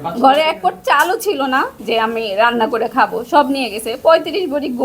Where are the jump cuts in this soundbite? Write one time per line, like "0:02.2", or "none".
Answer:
0:01.8